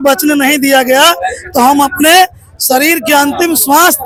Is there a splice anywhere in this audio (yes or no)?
no